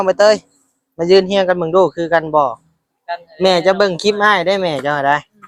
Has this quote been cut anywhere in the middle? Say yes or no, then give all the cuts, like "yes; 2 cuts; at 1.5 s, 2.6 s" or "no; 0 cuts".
no; 0 cuts